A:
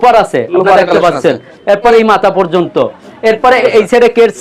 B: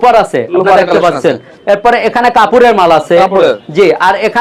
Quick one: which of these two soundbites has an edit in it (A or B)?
A